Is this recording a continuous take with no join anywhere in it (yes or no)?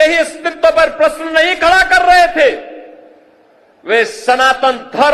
yes